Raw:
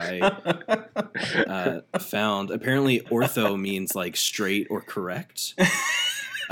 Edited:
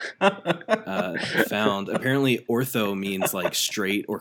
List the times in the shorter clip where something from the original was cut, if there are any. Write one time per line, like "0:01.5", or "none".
0:01.5